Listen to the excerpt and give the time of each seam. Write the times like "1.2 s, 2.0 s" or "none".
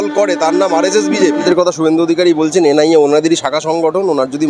1.4 s